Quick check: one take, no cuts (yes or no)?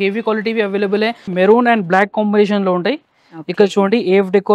no